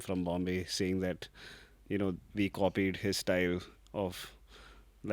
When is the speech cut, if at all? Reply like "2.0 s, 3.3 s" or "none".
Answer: none